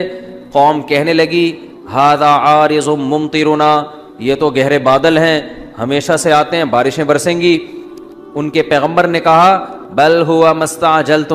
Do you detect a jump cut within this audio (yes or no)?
no